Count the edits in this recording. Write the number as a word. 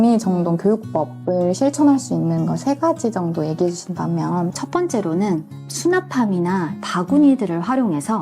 two